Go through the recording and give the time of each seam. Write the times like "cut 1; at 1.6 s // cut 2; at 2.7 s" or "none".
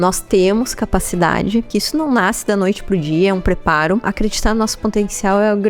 cut 1; at 1.7 s // cut 2; at 4.1 s